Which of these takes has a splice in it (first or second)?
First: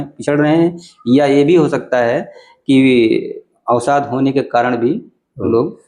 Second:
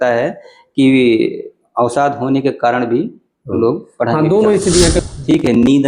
second